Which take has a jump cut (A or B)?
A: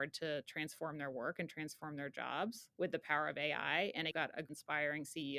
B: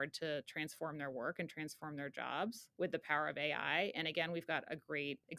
A